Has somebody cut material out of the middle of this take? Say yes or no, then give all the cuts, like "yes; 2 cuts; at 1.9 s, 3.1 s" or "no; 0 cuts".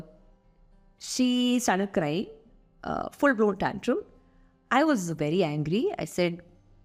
no; 0 cuts